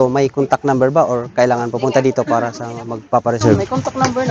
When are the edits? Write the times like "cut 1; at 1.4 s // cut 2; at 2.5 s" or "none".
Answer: none